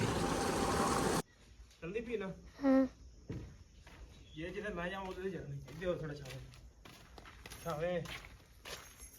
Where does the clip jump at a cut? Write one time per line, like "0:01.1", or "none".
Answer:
0:01.2